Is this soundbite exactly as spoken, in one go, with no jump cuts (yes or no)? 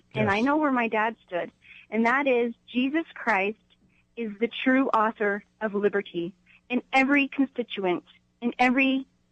yes